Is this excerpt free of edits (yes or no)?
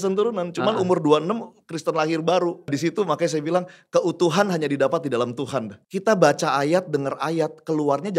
no